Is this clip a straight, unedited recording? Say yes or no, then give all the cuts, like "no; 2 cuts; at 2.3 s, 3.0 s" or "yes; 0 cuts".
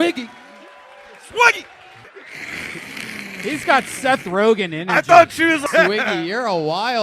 no; 2 cuts; at 2.1 s, 5.6 s